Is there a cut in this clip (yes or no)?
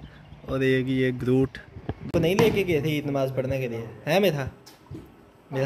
yes